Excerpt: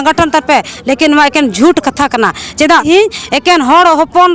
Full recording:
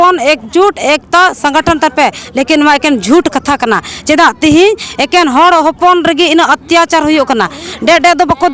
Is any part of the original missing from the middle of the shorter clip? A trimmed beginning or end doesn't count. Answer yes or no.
yes